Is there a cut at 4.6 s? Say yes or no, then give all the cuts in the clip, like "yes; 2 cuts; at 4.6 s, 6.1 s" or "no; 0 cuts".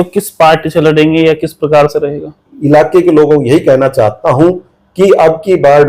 no; 1 cut; at 2.5 s